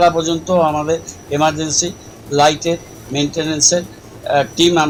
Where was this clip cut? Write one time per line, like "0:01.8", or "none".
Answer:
none